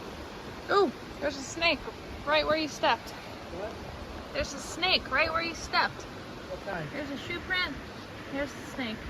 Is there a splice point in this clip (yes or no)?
no